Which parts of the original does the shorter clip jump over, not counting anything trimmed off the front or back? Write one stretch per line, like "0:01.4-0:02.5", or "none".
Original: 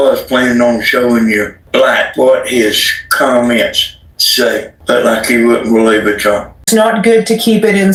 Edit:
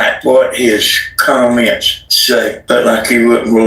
0:04.3-0:04.6